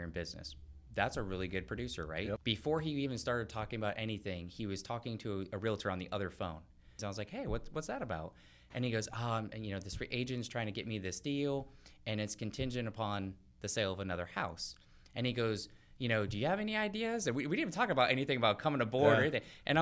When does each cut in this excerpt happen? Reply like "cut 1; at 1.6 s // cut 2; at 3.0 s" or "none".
cut 1; at 2.4 s // cut 2; at 7.0 s